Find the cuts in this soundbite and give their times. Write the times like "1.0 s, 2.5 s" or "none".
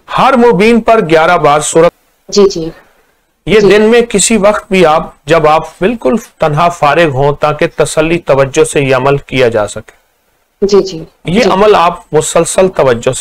1.9 s

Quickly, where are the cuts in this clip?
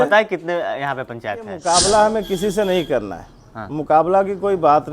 1.5 s

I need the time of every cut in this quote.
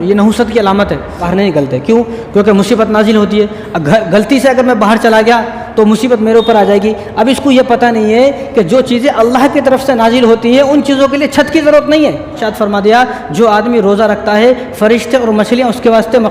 1.2 s, 12.4 s

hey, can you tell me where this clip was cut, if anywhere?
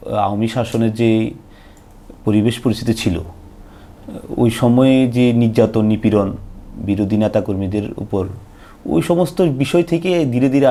none

